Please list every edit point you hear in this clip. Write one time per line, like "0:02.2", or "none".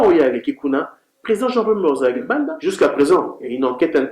0:02.6